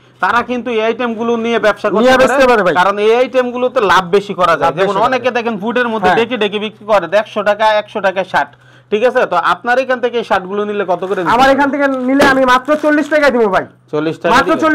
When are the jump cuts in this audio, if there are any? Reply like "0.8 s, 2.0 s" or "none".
none